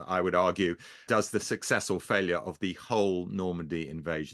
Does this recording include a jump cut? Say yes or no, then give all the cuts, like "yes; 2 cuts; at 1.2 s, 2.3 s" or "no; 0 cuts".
yes; 1 cut; at 1.0 s